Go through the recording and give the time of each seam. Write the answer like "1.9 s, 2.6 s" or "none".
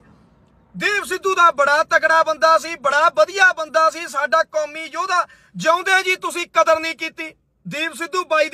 7.5 s